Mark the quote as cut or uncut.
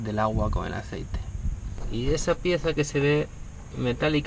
uncut